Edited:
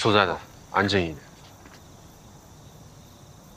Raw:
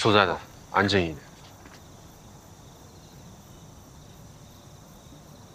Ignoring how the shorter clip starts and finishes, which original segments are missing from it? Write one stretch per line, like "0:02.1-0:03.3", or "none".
0:02.7-0:04.1